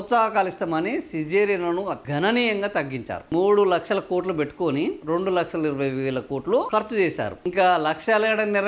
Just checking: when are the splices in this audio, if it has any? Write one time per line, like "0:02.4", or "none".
0:02.0
0:03.3
0:05.0